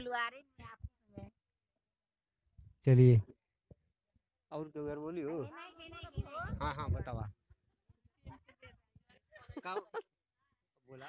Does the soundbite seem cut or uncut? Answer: uncut